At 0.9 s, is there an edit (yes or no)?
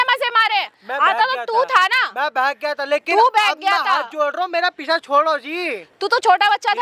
no